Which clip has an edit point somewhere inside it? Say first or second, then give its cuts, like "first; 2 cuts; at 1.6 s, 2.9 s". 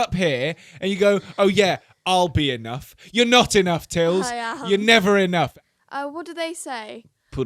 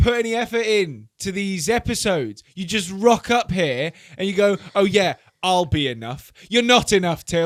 first; 1 cut; at 5.5 s